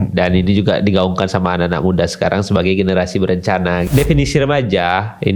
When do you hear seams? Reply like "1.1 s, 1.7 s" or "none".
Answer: 3.9 s